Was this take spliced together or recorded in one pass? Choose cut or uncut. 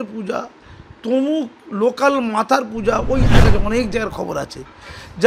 cut